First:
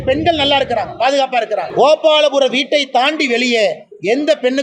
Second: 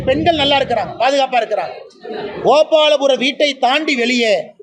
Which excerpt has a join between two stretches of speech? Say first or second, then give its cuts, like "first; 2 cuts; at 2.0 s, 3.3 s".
first; 1 cut; at 1.7 s